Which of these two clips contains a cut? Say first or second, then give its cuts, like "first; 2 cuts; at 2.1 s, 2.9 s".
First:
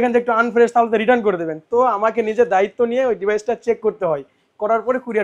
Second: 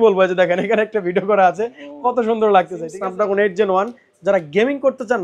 second; 1 cut; at 2.9 s